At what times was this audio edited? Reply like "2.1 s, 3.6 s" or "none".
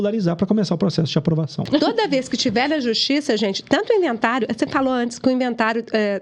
1.6 s